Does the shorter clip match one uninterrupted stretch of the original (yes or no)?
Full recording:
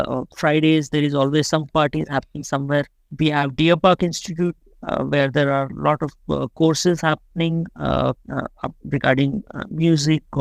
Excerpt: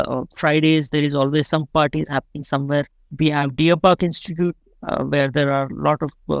yes